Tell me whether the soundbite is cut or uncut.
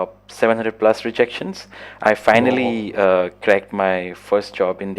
uncut